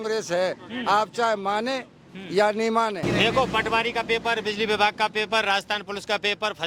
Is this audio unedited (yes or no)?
no